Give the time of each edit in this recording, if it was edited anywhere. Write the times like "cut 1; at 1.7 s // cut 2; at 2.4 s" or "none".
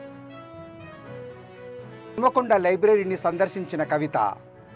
cut 1; at 1.0 s // cut 2; at 2.1 s